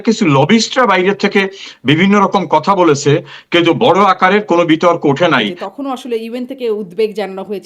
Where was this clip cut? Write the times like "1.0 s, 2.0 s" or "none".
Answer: 5.6 s